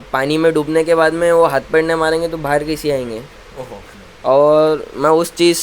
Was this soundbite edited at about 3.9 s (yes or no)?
yes